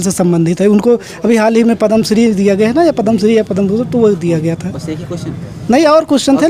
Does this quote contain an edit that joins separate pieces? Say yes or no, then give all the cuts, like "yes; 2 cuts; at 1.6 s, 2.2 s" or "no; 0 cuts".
no; 0 cuts